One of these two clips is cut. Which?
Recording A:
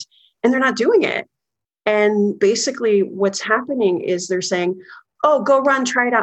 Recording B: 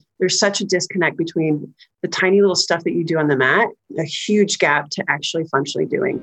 A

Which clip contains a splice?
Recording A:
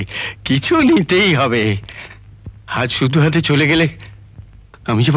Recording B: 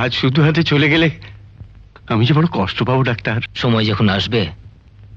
B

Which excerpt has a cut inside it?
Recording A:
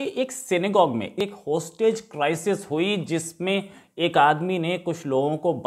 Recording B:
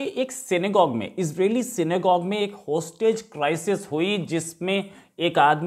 A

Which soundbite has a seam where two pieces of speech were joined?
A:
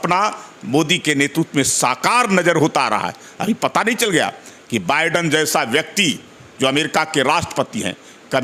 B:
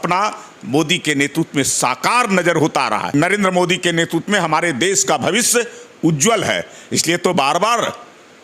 B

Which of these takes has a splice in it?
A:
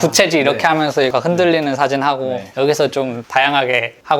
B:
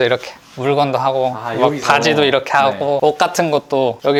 A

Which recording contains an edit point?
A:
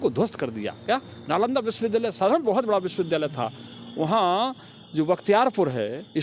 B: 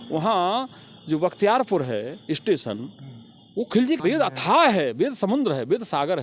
B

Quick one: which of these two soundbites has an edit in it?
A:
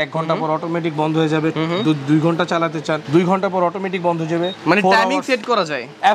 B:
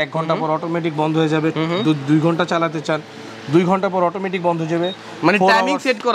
A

